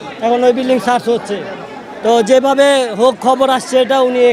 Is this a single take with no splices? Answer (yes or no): yes